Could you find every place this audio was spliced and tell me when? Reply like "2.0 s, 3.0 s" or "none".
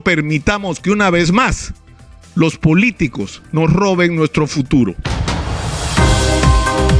5.1 s